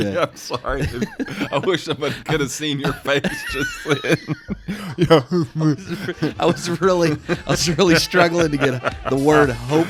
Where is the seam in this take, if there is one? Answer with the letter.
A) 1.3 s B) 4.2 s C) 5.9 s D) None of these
D